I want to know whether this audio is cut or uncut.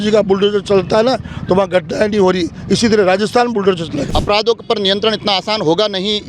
cut